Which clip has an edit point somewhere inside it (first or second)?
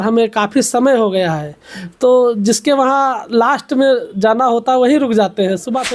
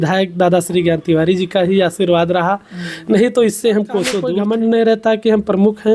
second